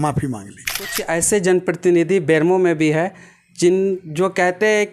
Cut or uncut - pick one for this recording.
cut